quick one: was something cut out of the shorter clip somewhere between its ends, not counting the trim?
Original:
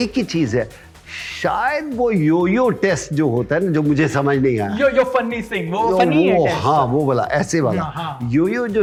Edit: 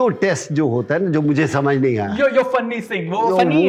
no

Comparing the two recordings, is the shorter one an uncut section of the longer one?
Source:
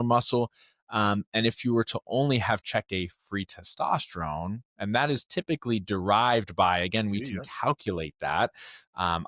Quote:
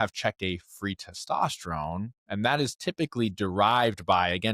yes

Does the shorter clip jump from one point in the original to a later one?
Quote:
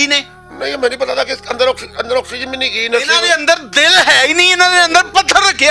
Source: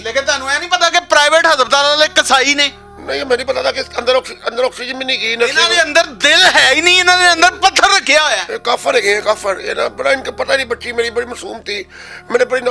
no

